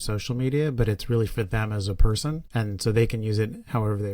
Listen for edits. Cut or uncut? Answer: cut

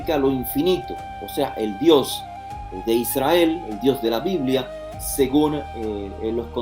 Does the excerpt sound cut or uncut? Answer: uncut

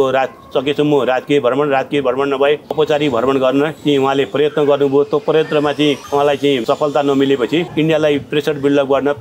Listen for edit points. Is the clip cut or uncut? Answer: cut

